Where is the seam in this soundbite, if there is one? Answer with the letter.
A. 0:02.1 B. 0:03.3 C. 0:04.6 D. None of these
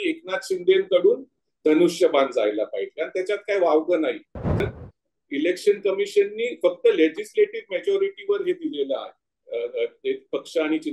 C